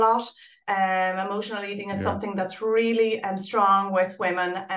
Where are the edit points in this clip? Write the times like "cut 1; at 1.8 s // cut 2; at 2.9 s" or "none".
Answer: none